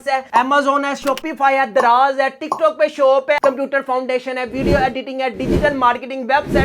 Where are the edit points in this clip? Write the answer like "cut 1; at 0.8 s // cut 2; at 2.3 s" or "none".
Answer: cut 1; at 3.4 s